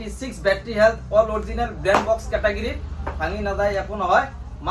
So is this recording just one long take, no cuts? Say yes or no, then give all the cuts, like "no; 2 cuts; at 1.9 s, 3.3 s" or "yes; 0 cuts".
yes; 0 cuts